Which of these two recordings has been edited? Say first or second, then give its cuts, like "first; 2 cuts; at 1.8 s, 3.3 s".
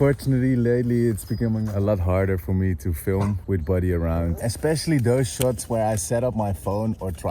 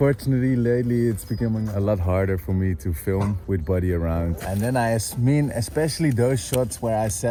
first; 1 cut; at 4.4 s